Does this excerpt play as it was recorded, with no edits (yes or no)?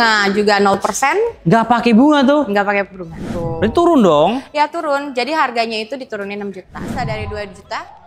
no